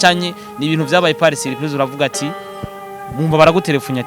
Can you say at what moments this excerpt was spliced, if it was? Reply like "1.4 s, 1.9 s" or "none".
none